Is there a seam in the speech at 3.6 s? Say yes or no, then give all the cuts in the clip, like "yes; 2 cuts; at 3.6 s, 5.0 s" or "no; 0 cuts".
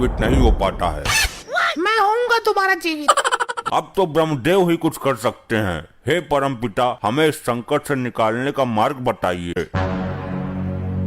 yes; 2 cuts; at 3.6 s, 9.6 s